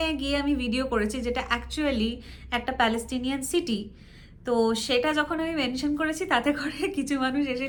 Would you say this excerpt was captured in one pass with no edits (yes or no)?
yes